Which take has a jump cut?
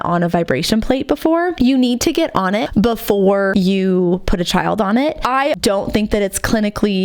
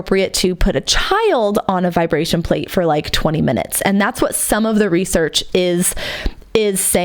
first; 4 cuts; at 1.5 s, 2.7 s, 3.5 s, 5.6 s

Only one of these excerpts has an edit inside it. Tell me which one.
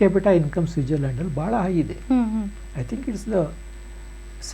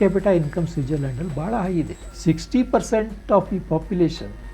second; 1 cut; at 2.0 s

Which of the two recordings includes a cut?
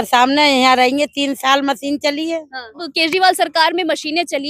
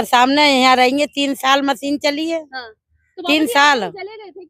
first; 1 cut; at 2.8 s

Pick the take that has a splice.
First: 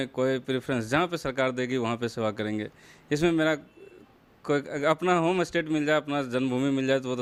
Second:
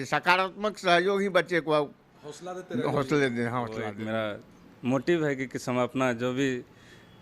second; 1 cut; at 4.0 s

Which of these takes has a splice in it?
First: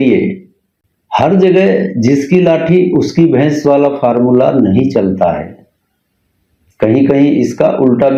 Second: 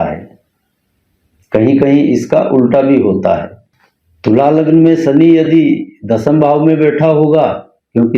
second; 1 cut; at 3.8 s

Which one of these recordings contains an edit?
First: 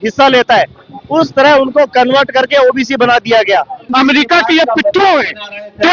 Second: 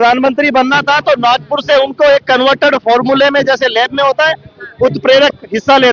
first; 1 cut; at 3.8 s

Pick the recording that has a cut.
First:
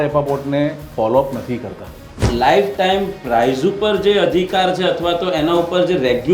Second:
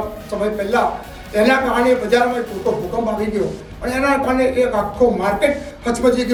first; 1 cut; at 2.3 s

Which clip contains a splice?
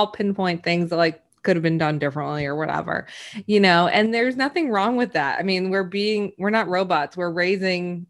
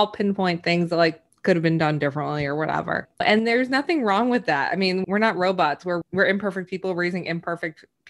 second; 3 cuts; at 3.2 s, 5.0 s, 6.0 s

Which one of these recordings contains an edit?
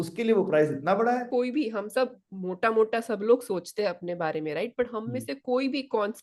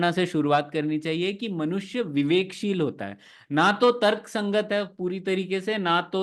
first; 1 cut; at 1.3 s

